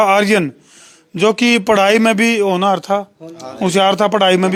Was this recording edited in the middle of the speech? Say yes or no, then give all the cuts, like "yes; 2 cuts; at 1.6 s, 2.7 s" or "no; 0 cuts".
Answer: no; 0 cuts